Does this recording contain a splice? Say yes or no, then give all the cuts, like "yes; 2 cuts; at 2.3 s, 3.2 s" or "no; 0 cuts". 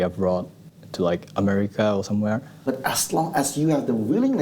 yes; 1 cut; at 2.5 s